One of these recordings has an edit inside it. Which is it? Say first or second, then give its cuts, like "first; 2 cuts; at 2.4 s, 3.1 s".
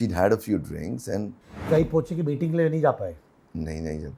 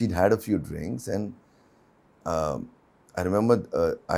first; 1 cut; at 1.7 s